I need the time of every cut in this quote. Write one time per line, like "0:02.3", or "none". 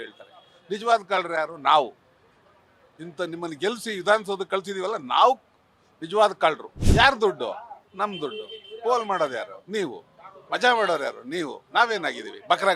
0:06.7